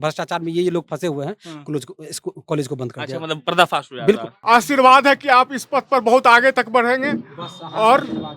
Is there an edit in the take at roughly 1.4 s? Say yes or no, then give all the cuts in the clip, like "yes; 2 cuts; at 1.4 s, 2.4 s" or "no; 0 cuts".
no; 1 cut; at 4.3 s